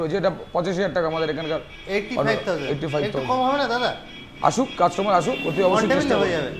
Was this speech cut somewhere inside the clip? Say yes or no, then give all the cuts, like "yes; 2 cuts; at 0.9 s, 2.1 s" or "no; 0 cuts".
no; 0 cuts